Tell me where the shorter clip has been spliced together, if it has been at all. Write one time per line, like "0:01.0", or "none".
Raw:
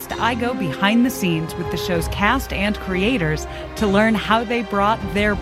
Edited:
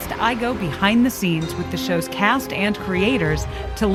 none